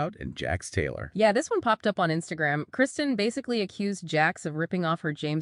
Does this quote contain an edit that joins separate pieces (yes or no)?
no